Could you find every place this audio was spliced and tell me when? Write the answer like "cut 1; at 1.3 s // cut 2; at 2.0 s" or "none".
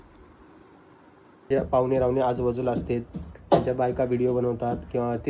cut 1; at 1.5 s